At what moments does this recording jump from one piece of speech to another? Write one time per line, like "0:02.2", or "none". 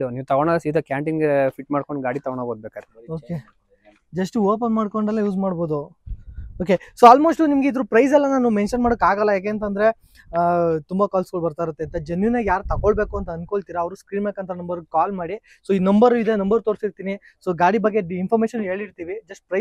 none